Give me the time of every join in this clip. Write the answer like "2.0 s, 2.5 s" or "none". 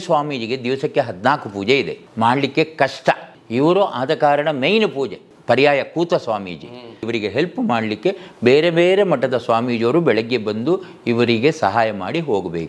2.0 s, 3.3 s, 5.3 s, 7.0 s